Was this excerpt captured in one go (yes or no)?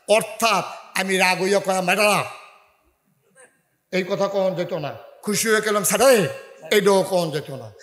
yes